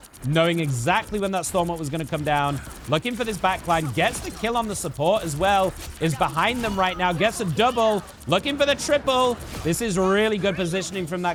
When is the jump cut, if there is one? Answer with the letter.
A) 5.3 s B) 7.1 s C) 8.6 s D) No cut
D